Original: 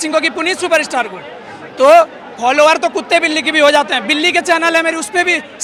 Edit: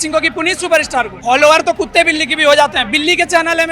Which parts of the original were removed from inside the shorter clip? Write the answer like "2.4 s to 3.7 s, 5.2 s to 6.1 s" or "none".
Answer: 1.1 s to 2.3 s